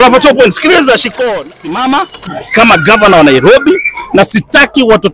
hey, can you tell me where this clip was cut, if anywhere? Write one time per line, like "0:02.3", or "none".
0:01.1